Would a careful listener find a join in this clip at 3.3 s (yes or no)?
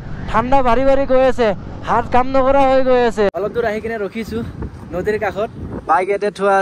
yes